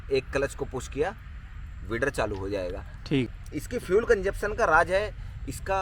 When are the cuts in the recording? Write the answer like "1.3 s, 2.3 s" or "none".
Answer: 3.3 s